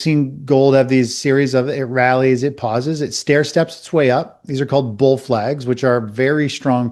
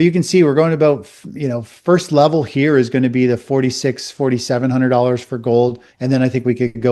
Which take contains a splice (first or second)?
second